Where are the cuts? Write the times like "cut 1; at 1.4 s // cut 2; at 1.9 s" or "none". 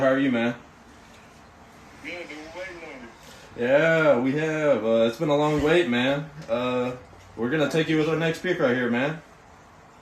none